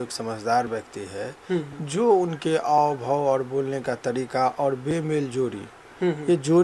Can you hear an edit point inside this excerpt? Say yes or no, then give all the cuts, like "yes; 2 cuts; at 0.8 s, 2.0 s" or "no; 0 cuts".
no; 0 cuts